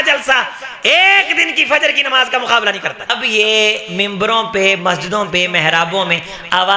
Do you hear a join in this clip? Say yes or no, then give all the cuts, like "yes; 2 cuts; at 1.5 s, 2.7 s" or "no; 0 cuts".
yes; 1 cut; at 3.1 s